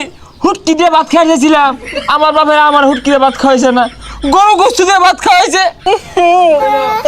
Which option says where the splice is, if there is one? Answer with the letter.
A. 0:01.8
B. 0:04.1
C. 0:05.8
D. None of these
C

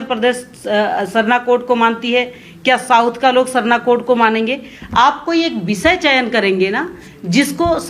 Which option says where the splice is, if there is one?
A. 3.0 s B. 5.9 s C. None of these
C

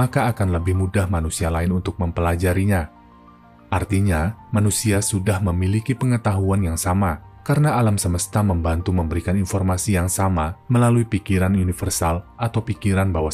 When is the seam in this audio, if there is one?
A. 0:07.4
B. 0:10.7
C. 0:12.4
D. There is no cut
D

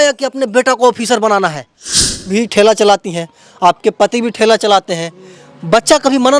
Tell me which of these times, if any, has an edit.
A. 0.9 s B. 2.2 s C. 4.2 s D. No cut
B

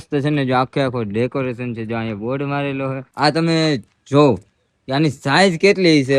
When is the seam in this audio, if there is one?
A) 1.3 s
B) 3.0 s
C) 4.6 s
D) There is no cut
B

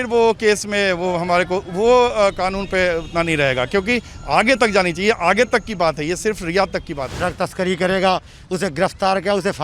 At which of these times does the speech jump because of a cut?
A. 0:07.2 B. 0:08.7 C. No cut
A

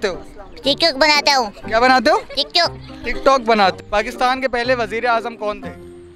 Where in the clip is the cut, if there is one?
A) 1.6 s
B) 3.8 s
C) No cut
B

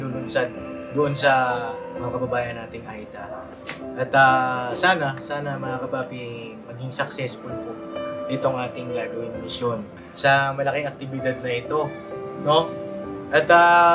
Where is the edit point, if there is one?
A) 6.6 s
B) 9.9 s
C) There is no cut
B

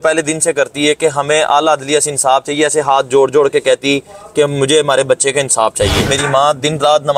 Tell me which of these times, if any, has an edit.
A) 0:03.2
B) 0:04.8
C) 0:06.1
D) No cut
C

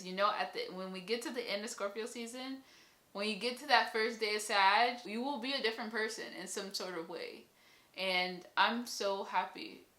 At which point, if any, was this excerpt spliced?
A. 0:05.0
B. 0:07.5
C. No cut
A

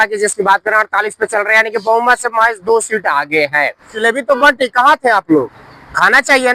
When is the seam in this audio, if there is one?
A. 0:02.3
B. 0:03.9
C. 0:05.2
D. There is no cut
B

